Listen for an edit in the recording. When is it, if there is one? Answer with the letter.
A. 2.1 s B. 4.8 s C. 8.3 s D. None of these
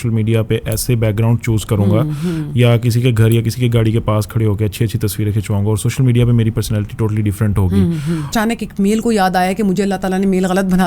C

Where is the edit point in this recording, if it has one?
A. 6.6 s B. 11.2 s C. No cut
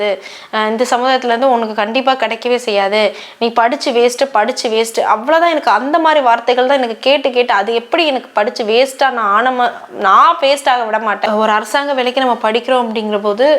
B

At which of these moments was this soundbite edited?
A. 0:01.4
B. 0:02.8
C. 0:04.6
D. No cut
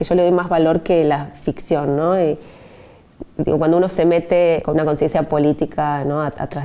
C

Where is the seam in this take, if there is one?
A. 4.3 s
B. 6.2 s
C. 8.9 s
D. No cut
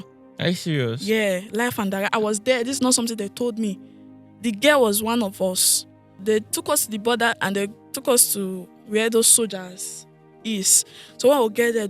B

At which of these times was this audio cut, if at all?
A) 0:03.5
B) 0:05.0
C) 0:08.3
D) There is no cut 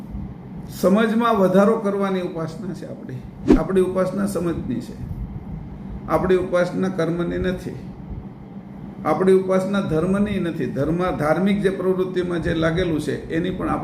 A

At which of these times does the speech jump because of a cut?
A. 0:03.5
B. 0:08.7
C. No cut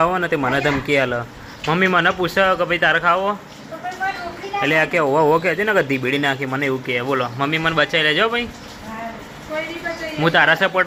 C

